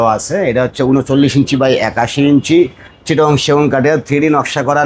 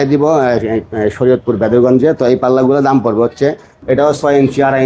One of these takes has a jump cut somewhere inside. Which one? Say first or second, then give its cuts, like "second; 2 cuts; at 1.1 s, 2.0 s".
second; 1 cut; at 3.7 s